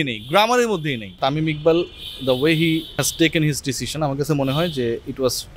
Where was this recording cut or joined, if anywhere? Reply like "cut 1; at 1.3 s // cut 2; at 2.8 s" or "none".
cut 1; at 1.1 s // cut 2; at 3.0 s